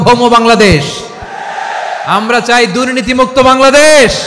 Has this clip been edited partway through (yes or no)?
no